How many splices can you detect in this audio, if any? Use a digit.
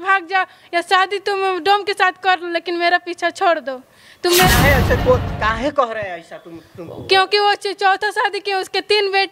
0